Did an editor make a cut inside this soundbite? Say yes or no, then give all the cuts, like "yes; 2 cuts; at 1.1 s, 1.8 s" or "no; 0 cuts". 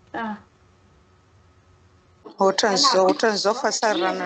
yes; 1 cut; at 2.4 s